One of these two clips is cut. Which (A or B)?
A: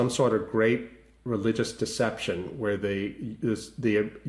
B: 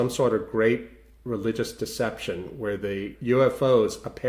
B